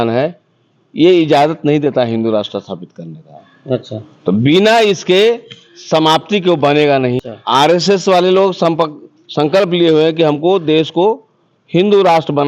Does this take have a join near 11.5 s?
no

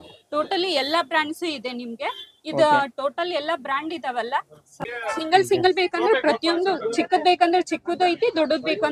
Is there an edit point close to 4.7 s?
yes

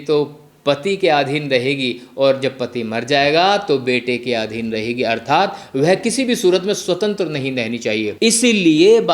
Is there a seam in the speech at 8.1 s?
yes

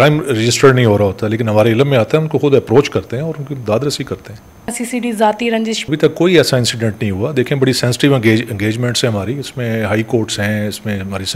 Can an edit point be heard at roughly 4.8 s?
yes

